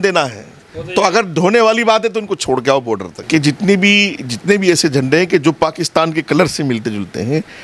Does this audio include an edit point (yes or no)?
yes